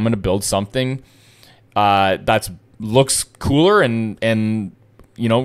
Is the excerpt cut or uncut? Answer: uncut